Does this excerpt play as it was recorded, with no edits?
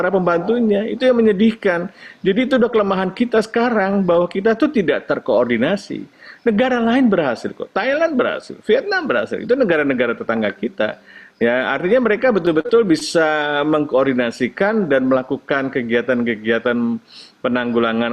yes; 0 cuts

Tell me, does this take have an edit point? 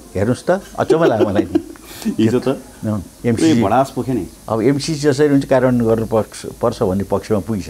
yes; 2 cuts; at 3.1 s, 4.4 s

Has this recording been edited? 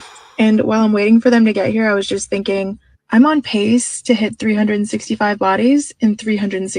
no; 0 cuts

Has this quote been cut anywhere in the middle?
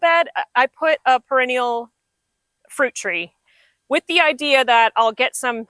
no; 0 cuts

